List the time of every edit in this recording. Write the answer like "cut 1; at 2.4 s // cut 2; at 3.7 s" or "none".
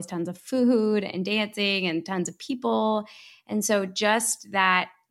none

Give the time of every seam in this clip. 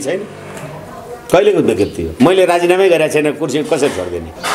cut 1; at 2.0 s

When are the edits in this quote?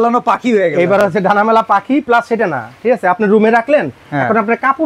none

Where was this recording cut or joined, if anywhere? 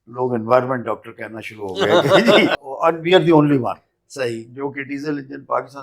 cut 1; at 2.7 s

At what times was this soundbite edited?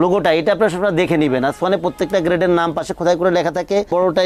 none

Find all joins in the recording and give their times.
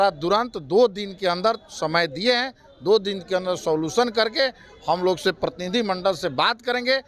none

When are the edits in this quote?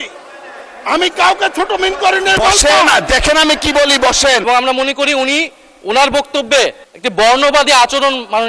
cut 1; at 4.5 s // cut 2; at 6.9 s

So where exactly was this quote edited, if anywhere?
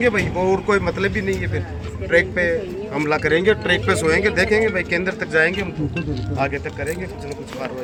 none

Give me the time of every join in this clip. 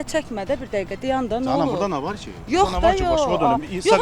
none

